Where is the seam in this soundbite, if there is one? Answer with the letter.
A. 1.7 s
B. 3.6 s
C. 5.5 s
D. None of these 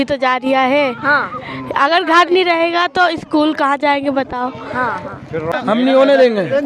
C